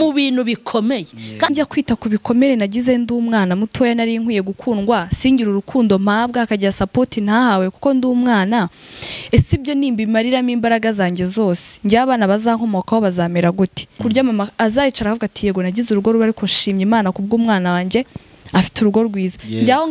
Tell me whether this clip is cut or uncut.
cut